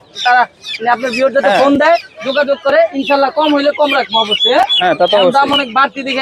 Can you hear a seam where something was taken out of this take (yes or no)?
no